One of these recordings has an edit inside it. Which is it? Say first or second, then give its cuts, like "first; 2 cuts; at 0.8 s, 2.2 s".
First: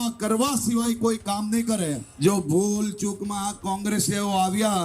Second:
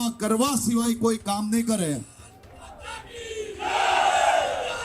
first; 1 cut; at 2.1 s